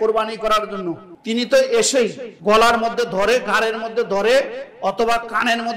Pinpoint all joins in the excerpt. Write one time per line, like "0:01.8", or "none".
0:01.1
0:02.3